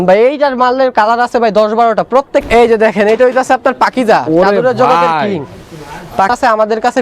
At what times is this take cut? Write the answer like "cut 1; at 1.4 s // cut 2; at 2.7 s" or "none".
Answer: cut 1; at 2.4 s // cut 2; at 6.3 s